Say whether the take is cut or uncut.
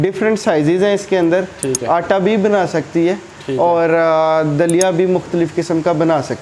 uncut